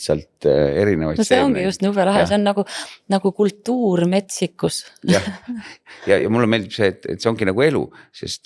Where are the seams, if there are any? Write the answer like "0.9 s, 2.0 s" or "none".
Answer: none